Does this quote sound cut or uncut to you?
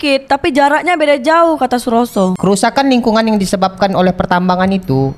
cut